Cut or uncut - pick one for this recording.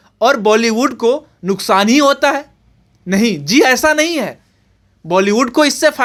uncut